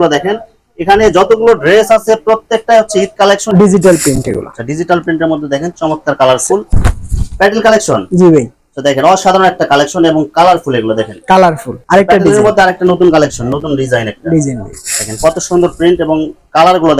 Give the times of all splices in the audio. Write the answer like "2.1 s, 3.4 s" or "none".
3.4 s, 6.7 s, 11.7 s